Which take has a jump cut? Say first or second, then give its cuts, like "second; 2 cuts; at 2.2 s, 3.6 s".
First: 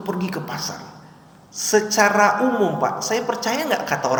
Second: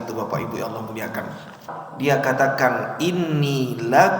second; 1 cut; at 1.6 s